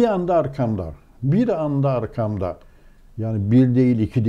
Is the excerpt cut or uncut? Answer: uncut